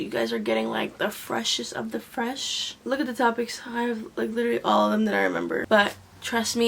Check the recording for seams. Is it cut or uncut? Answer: cut